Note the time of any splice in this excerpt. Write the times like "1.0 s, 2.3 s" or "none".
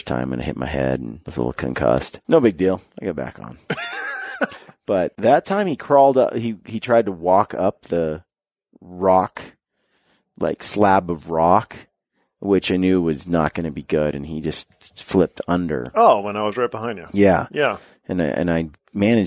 1.2 s, 2.1 s, 2.9 s, 4.7 s

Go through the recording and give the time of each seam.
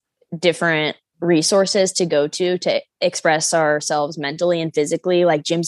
2.9 s

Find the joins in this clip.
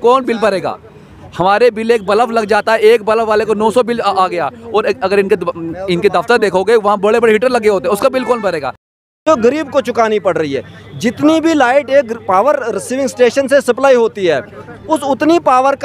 9.2 s

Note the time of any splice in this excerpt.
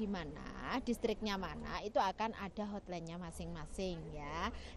none

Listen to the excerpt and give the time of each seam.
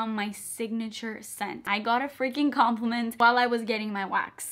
1.6 s

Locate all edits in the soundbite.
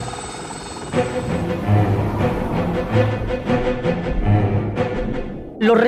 1.6 s

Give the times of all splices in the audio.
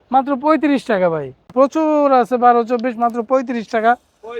1.5 s

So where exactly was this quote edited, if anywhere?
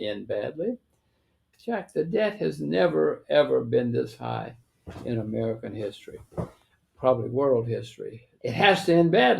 1.5 s, 8.3 s

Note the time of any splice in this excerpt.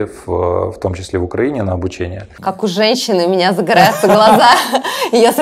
2.2 s

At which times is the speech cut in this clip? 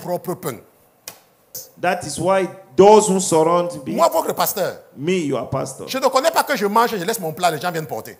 1.6 s

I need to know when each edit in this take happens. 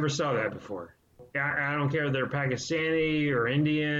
1.2 s

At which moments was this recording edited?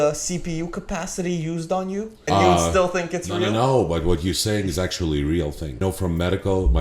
2.3 s, 5.8 s

